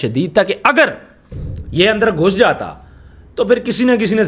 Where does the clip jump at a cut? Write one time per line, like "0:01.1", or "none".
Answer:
none